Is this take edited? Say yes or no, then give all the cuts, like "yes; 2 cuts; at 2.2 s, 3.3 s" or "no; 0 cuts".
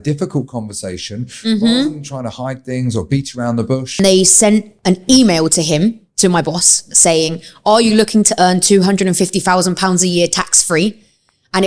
yes; 1 cut; at 4.0 s